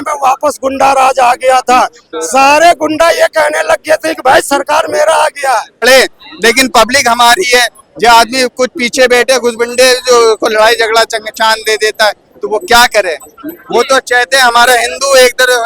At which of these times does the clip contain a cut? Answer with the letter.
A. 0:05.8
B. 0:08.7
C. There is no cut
A